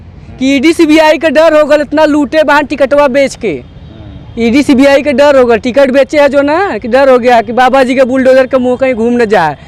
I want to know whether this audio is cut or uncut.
uncut